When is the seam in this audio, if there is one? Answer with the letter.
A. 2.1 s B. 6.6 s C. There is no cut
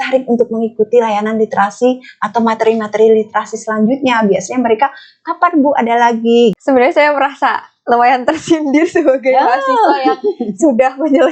B